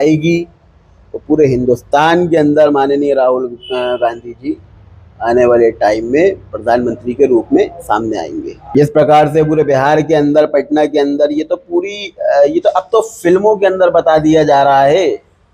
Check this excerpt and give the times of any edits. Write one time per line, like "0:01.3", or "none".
0:08.7